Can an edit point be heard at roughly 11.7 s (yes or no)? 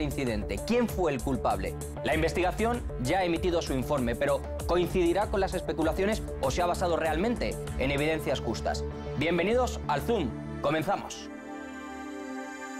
yes